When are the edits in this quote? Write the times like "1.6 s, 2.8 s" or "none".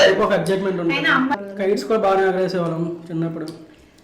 1.3 s